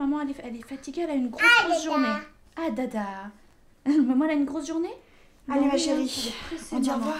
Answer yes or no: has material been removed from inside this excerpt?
no